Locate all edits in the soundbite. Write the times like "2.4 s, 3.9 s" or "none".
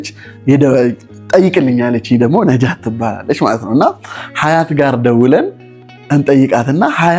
none